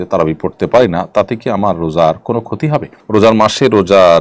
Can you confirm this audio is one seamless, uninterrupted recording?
no; 1 cut; at 2.9 s

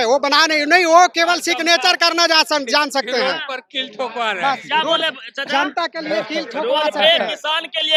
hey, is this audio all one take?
yes; 0 cuts

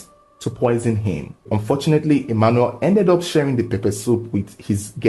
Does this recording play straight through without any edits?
yes; 0 cuts

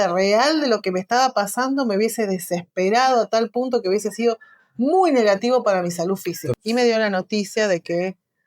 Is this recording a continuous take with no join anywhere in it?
no; 1 cut; at 6.4 s

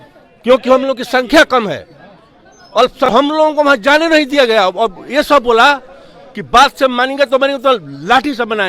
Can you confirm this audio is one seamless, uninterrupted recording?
no; 1 cut; at 3.1 s

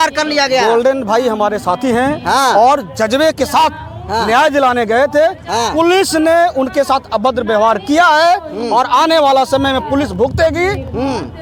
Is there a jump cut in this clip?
no; 0 cuts

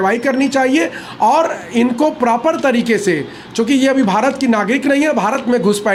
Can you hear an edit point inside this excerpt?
no; 0 cuts

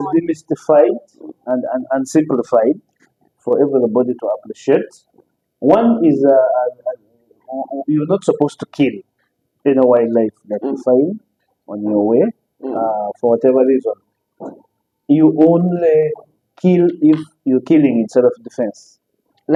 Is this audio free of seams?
yes; 0 cuts

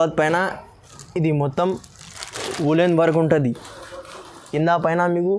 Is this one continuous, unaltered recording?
no; 1 cut; at 4.4 s

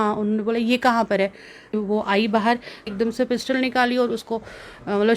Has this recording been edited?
yes; 2 cuts; at 1.7 s, 2.9 s

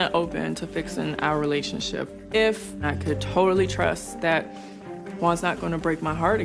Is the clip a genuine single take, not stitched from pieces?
yes; 0 cuts

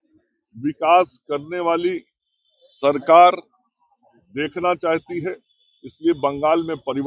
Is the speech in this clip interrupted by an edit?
no; 0 cuts

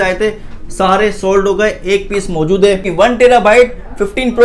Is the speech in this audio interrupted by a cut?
yes; 1 cut; at 2.9 s

